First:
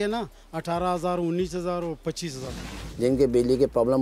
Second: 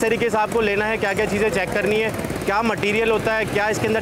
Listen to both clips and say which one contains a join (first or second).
first